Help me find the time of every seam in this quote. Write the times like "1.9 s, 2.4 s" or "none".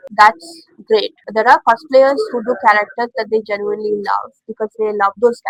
none